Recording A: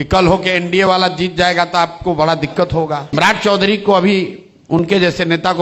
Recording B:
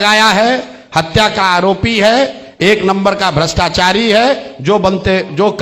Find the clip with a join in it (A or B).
A